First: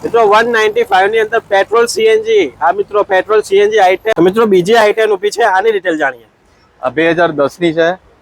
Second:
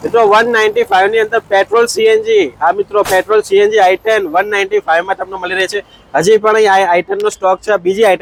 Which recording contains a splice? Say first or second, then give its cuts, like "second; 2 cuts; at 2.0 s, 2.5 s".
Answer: first; 1 cut; at 4.1 s